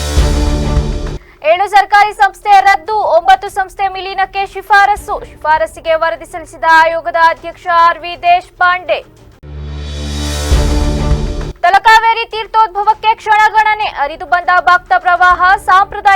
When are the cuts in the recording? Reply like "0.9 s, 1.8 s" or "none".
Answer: 1.1 s